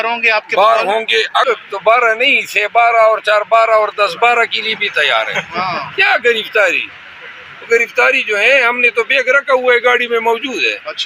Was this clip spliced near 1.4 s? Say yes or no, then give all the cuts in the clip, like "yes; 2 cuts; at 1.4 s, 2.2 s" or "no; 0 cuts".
yes; 1 cut; at 1.4 s